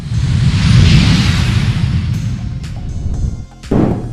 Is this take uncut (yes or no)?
yes